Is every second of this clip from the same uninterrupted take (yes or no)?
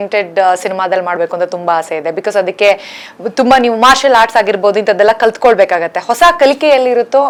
yes